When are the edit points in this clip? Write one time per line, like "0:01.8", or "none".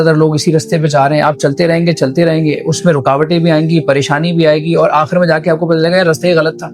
none